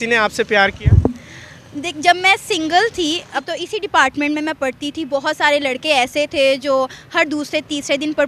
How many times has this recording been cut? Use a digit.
1